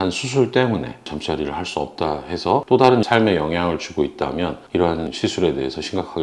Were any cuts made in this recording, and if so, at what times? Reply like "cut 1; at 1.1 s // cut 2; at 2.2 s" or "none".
cut 1; at 1.0 s // cut 2; at 2.6 s // cut 3; at 5.1 s